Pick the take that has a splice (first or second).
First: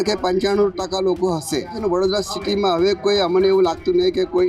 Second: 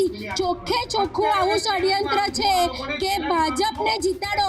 first